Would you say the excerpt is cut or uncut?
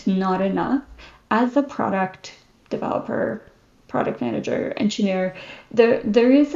uncut